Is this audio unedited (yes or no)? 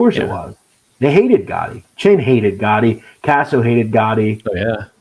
yes